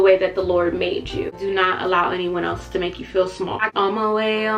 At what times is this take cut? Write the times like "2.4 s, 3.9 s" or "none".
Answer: 1.3 s, 3.6 s